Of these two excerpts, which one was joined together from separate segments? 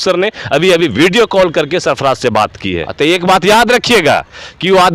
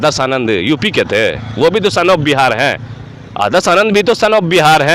first; 1 cut; at 2.9 s

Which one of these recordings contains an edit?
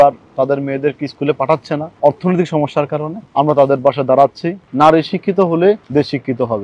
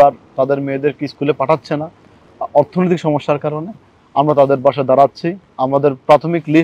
first; 4 cuts; at 1.9 s, 3.2 s, 4.6 s, 5.8 s

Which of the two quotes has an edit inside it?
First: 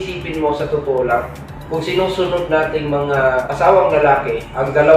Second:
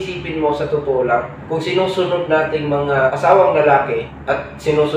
second; 3 cuts; at 1.4 s, 3.1 s, 4.1 s

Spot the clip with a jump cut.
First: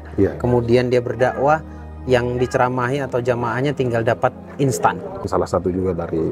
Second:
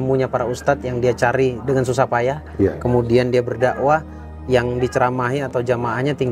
first; 1 cut; at 5.3 s

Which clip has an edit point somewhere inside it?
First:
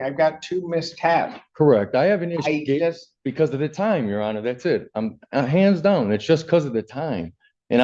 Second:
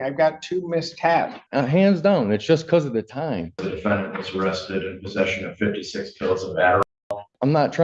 second; 3 cuts; at 1.4 s, 3.7 s, 6.9 s

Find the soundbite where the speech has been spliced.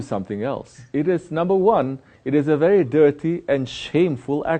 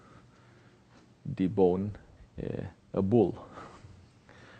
second; 1 cut; at 2.8 s

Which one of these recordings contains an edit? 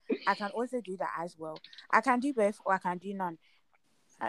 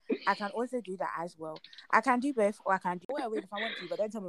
second; 1 cut; at 3.1 s

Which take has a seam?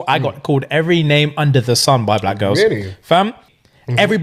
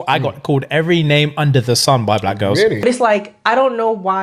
second; 1 cut; at 2.8 s

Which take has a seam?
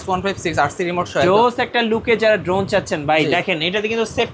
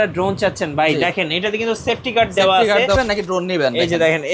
second; 1 cut; at 2.9 s

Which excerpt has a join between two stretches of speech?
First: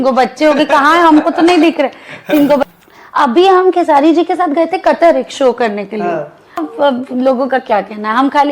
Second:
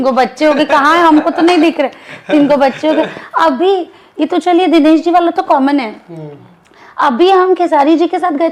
first; 2 cuts; at 2.6 s, 6.7 s

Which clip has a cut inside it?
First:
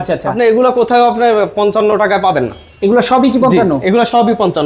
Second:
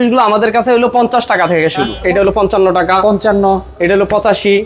second; 1 cut; at 1.9 s

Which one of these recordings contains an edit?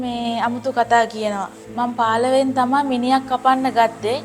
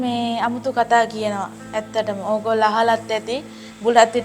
first; 1 cut; at 1.6 s

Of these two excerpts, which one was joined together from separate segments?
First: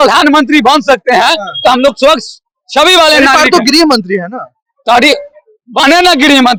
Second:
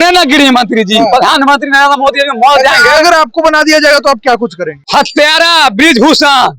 second; 1 cut; at 4.7 s

